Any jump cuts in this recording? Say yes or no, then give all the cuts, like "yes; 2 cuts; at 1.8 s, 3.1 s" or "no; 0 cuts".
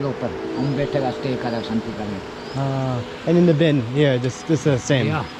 no; 0 cuts